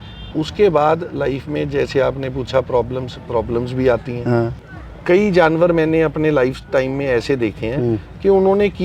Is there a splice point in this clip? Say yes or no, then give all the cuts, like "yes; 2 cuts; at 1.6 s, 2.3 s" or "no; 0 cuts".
yes; 1 cut; at 4.6 s